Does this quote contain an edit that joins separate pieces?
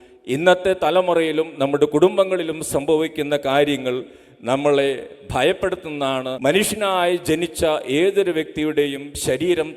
yes; 1 cut; at 6.3 s

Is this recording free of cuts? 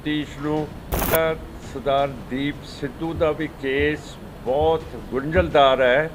no; 1 cut; at 1.1 s

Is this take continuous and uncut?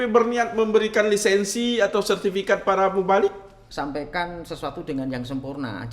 no; 1 cut; at 3.6 s

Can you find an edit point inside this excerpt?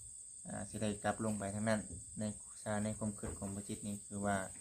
no; 0 cuts

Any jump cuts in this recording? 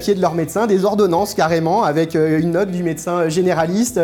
no; 0 cuts

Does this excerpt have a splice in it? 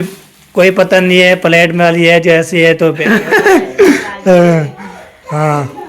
yes; 1 cut; at 3.0 s

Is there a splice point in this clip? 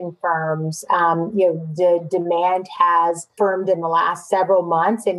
yes; 2 cuts; at 3.3 s, 4.2 s

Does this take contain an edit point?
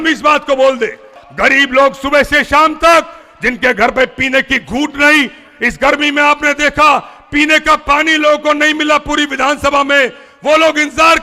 yes; 1 cut; at 1.2 s

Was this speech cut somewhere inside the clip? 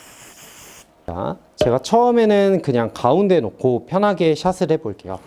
yes; 1 cut; at 1.1 s

